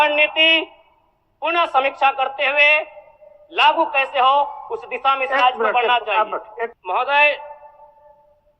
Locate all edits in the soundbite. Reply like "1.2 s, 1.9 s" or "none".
6.8 s